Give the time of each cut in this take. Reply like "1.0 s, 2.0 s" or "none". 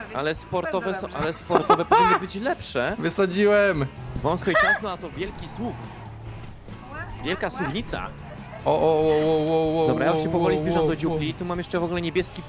4.0 s